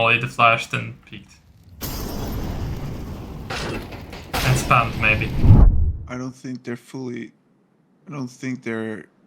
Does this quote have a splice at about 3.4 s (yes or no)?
no